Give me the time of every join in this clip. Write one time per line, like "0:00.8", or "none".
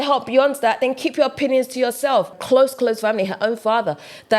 0:02.4